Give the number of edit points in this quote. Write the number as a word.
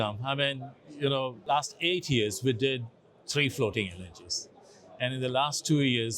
one